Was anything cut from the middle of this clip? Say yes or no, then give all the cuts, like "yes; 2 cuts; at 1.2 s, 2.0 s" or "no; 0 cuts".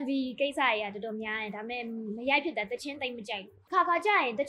yes; 1 cut; at 3.6 s